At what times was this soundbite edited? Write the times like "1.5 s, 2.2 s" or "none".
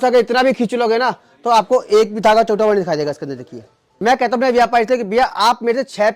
3.9 s